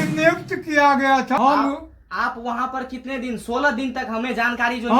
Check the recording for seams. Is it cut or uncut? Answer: cut